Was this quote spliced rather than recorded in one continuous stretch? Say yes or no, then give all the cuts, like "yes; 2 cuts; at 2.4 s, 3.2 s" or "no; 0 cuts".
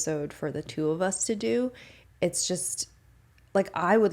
no; 0 cuts